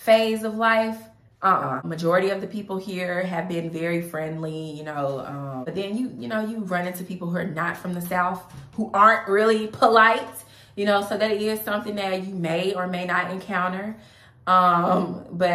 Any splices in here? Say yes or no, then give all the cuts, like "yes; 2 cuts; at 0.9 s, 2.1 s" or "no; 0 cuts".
yes; 2 cuts; at 1.9 s, 5.7 s